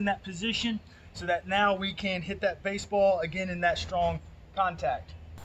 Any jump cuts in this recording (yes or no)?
no